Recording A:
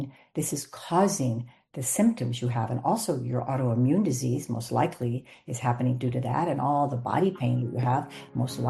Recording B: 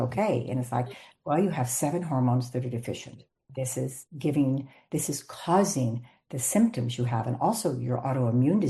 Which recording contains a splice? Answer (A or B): B